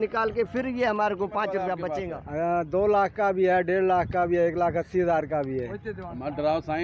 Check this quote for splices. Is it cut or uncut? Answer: cut